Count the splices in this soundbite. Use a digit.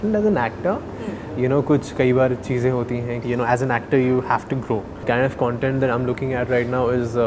2